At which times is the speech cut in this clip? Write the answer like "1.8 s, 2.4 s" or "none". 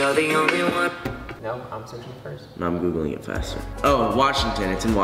2.3 s